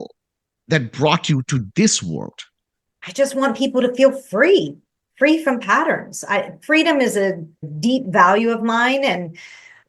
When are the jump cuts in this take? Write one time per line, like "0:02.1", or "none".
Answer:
0:03.0